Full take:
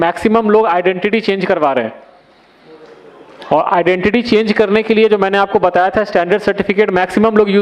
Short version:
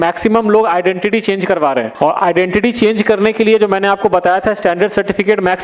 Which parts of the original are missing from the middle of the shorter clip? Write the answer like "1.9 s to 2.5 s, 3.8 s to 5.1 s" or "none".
1.9 s to 3.4 s